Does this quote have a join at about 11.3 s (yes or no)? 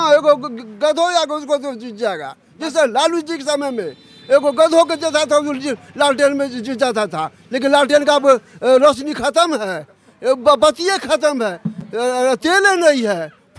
no